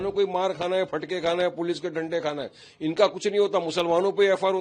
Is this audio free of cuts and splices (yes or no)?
yes